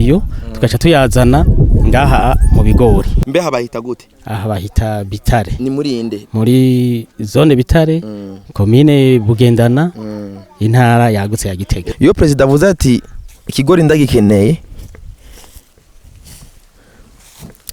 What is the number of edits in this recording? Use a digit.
2